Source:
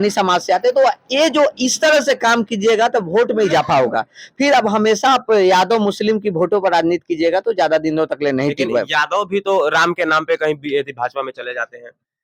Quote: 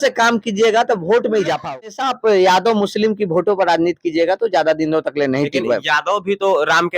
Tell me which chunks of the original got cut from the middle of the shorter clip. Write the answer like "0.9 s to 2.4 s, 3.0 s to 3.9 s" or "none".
4.1 s to 5.1 s